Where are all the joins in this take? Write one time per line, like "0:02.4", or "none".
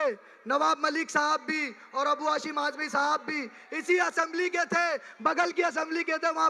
none